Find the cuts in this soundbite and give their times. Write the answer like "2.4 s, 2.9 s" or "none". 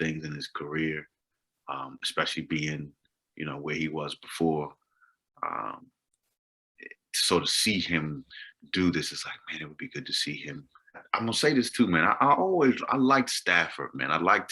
11.1 s